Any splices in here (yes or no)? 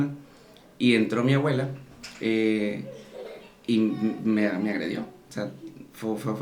no